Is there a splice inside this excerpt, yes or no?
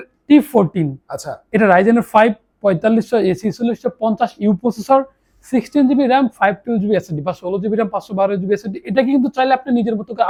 no